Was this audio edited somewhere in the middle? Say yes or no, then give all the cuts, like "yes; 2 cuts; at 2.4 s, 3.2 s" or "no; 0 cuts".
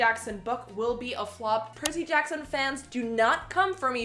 yes; 1 cut; at 1.7 s